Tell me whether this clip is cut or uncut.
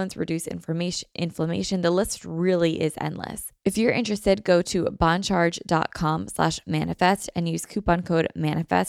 cut